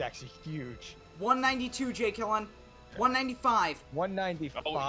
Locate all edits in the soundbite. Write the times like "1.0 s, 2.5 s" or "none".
none